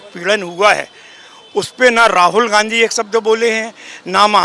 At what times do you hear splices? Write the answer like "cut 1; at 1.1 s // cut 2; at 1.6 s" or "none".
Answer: none